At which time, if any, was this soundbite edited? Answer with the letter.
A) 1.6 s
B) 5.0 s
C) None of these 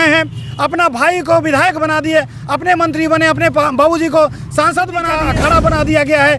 B